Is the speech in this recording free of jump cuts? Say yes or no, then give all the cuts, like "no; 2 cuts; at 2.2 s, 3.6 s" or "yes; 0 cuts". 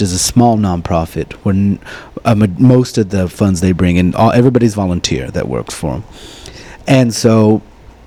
yes; 0 cuts